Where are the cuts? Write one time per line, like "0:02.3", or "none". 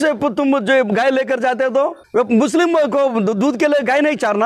0:02.0